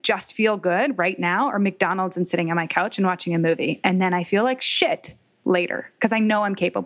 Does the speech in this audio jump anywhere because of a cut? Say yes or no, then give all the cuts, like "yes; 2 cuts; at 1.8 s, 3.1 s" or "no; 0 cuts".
yes; 1 cut; at 5.9 s